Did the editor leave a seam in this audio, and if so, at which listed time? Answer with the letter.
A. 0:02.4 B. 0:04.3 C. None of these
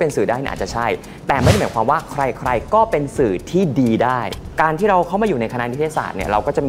B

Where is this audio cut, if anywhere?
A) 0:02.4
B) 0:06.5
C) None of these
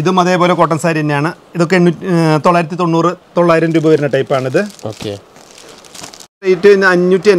B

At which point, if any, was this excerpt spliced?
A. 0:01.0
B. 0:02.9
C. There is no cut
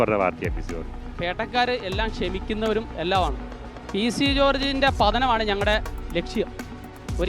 A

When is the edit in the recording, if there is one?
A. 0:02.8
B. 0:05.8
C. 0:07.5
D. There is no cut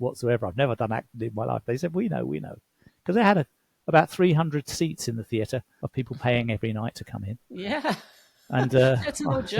B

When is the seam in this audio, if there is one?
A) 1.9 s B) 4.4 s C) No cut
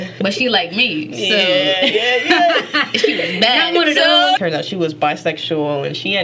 B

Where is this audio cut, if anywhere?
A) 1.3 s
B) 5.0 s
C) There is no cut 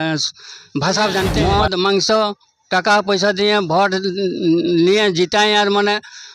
A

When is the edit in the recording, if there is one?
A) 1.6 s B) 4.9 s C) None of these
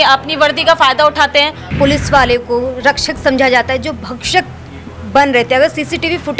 A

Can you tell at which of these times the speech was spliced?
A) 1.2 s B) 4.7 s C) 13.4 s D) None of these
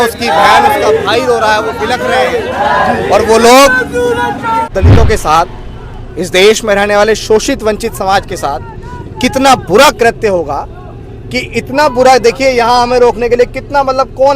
B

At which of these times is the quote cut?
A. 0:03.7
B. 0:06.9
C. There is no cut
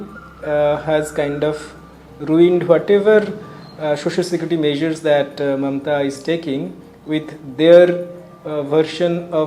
C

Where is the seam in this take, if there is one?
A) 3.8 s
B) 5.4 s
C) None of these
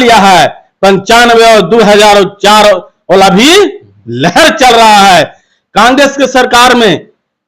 B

